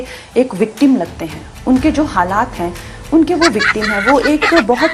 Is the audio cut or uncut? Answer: uncut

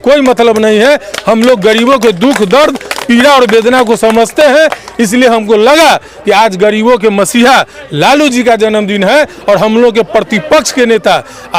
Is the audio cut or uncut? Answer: uncut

